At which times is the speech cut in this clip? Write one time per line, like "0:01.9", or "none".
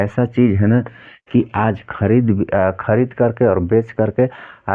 none

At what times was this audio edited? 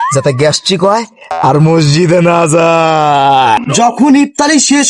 0:03.6

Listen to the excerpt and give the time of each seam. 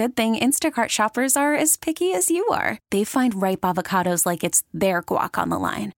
none

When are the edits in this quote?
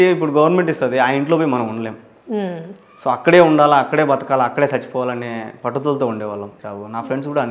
0:06.6

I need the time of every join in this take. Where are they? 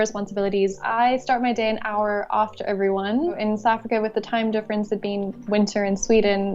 0:00.8
0:03.4

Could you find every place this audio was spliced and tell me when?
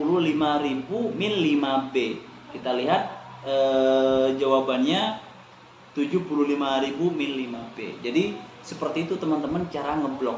none

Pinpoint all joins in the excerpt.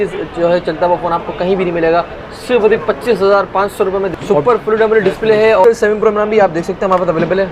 0:04.1
0:05.6

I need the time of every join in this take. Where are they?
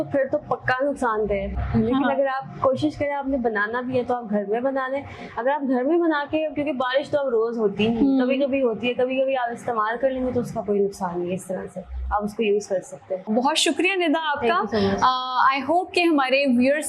none

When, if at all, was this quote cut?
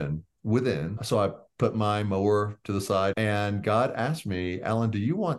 0:01.0
0:03.2

